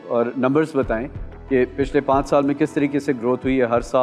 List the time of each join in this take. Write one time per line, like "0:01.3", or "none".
none

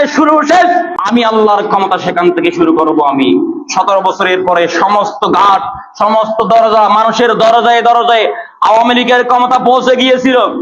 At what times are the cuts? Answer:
0:01.0

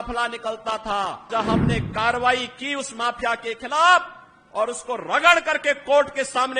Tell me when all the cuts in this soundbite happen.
0:01.3

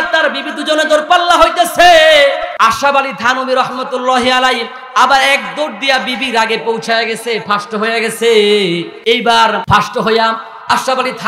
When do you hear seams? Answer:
0:02.5
0:08.9
0:09.6

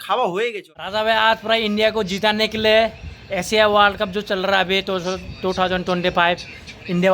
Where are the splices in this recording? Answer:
0:00.9

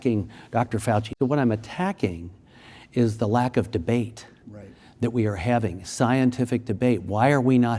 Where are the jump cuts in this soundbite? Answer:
0:01.1

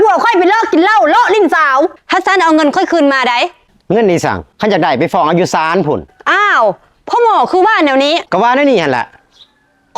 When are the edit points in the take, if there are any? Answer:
0:02.0
0:04.5
0:08.2

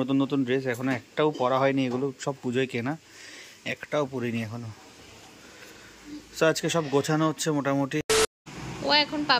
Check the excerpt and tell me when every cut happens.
0:08.0

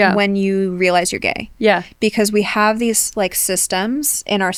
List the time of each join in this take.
none

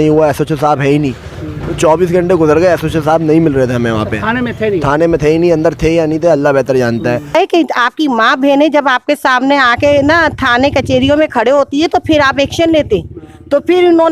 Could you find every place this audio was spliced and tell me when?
0:07.3

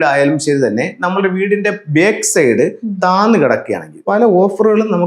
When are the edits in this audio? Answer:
0:04.0

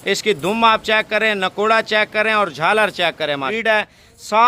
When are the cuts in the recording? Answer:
0:03.5

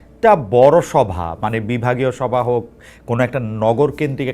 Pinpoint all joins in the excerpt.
none

